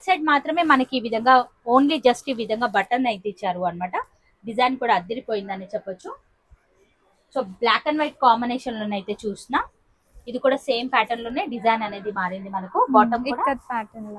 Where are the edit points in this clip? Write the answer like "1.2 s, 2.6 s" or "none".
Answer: none

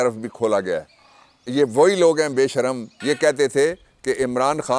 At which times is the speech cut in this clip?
2.9 s

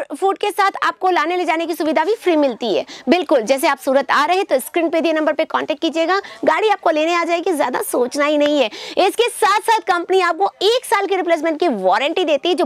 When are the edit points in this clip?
none

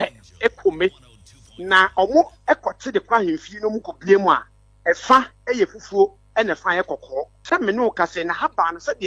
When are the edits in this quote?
7.4 s

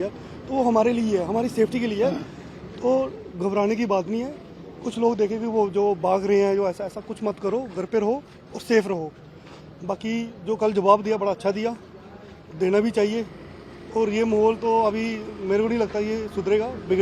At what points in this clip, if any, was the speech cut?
none

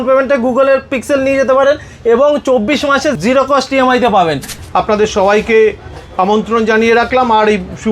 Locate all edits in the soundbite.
3.2 s, 4.5 s

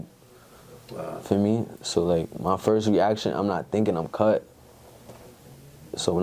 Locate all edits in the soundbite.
none

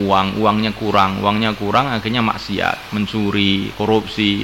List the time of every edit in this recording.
2.8 s

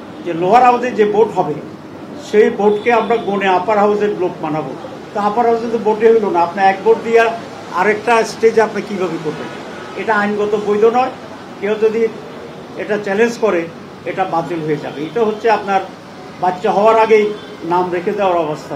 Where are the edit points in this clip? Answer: none

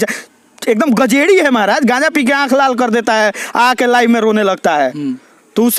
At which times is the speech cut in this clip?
none

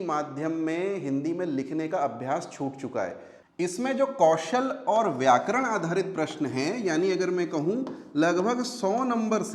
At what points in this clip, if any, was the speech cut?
3.5 s

